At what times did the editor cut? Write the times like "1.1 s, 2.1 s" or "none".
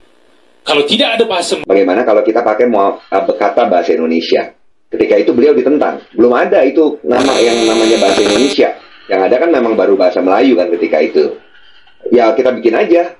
1.5 s